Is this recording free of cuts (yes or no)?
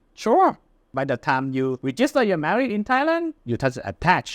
no